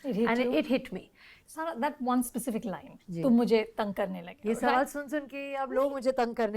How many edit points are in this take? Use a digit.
1